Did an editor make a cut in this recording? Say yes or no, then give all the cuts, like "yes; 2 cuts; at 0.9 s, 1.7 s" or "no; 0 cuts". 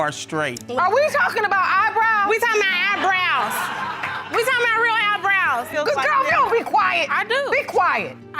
yes; 1 cut; at 5.7 s